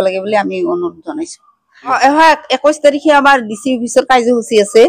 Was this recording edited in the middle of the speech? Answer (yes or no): yes